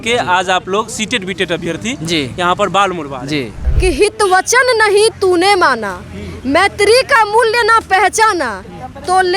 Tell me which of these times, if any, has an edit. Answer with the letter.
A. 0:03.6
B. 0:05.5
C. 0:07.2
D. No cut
A